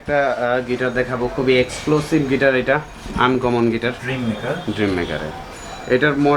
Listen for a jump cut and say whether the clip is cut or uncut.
cut